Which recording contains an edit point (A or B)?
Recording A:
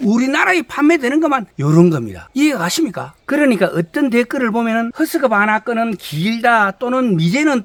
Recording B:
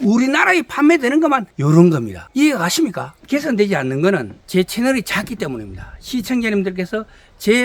B